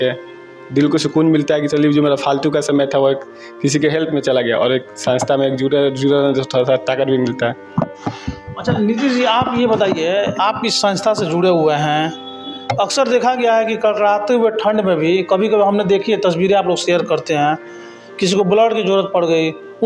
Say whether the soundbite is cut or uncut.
uncut